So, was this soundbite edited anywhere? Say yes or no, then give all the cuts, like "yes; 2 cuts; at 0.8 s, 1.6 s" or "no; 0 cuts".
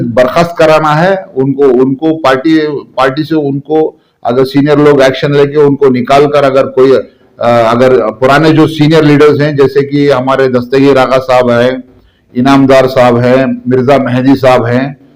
no; 0 cuts